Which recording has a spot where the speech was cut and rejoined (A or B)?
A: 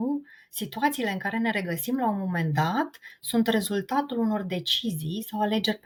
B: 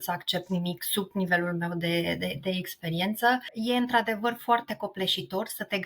B